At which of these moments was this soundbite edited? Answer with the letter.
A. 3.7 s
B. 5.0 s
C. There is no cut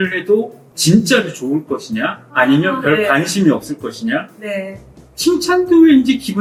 C